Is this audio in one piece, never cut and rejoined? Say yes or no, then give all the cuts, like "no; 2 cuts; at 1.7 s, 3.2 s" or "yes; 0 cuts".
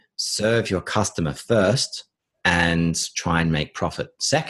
yes; 0 cuts